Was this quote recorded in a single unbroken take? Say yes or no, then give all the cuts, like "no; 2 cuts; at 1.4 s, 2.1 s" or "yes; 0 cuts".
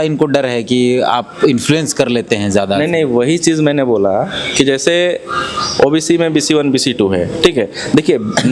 yes; 0 cuts